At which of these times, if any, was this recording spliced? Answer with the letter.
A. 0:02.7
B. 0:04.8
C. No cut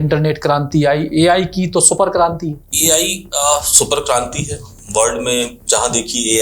A